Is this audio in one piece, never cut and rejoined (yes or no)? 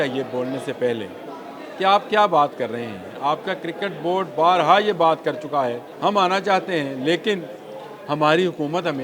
no